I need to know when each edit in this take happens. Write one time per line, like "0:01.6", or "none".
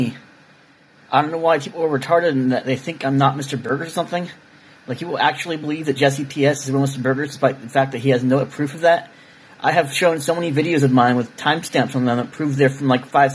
0:01.3